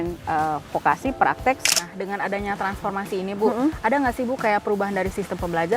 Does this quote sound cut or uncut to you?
cut